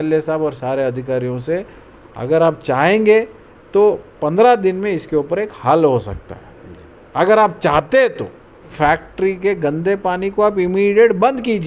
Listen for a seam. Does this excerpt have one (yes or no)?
yes